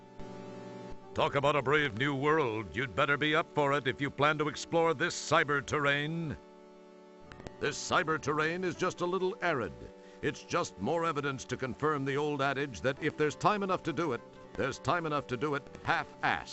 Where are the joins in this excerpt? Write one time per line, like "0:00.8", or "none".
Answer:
0:04.6